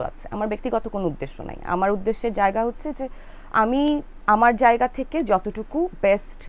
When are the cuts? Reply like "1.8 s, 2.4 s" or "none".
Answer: none

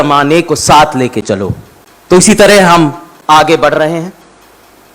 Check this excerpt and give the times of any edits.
none

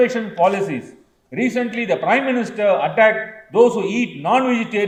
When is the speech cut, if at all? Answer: none

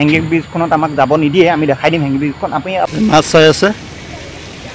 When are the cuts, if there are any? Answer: 2.9 s

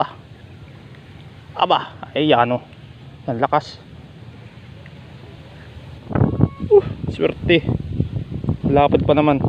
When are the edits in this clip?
6.1 s

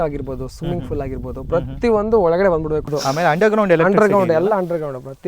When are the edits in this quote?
2.9 s

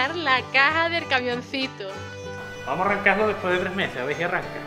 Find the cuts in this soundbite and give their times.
2.5 s

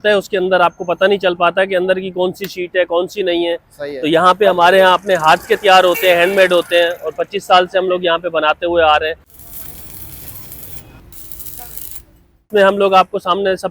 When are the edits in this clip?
none

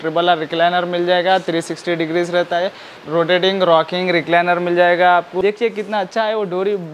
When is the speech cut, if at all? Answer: 3.0 s, 5.3 s

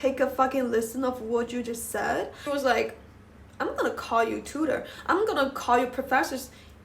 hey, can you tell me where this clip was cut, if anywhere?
2.4 s

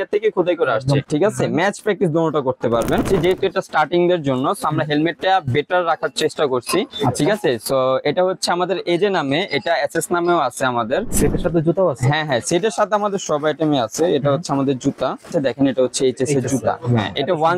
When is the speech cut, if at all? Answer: 1.1 s, 3.1 s, 11.1 s, 15.3 s

